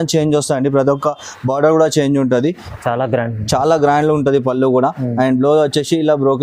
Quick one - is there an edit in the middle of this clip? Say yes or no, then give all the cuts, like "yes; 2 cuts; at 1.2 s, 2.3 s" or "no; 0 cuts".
yes; 1 cut; at 2.7 s